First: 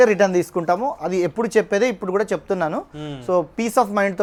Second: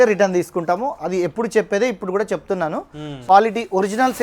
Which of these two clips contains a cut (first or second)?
second